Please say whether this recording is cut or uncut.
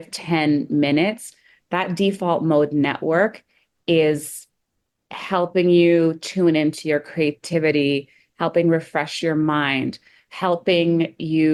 uncut